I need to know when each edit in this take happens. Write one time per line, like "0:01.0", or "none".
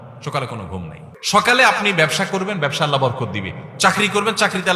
0:01.1